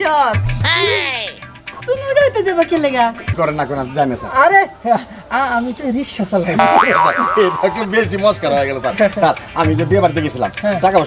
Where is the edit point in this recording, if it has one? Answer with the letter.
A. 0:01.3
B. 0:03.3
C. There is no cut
B